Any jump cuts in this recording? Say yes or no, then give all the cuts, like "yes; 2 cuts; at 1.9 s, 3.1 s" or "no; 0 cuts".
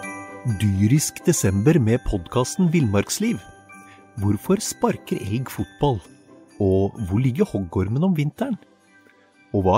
no; 0 cuts